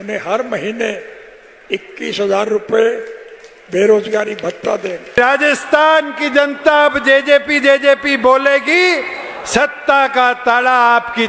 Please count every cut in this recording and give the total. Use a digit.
1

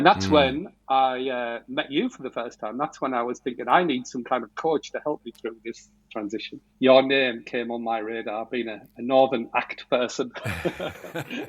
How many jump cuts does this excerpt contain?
1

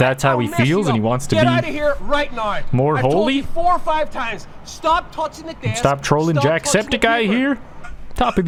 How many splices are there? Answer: 0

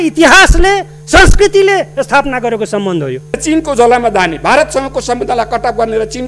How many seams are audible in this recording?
1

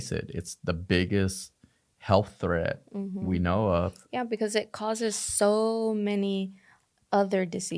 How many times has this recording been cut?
0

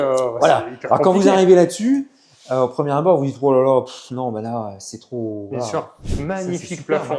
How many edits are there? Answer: 1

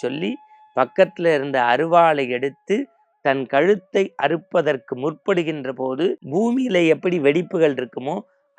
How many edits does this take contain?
1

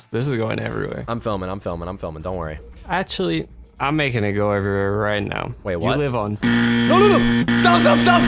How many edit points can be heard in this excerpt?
1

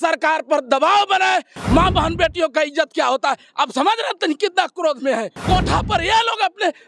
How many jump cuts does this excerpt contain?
2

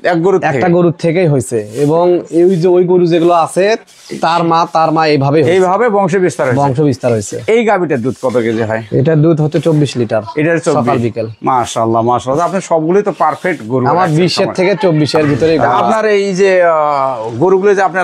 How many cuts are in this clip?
1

